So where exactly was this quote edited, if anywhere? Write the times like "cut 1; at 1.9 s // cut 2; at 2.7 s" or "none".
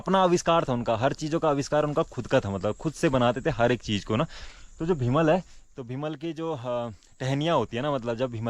none